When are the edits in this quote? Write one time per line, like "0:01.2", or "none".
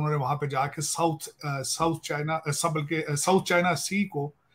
none